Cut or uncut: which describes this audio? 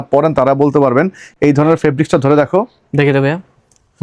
uncut